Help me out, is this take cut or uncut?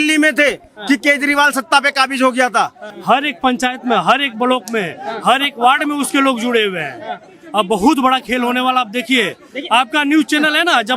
cut